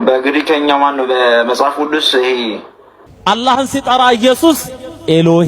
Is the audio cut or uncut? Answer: cut